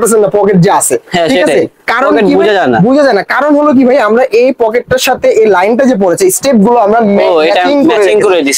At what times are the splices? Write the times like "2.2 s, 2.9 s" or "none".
none